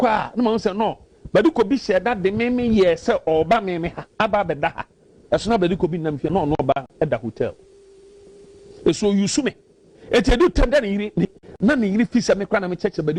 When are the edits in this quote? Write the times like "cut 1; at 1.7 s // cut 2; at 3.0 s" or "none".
none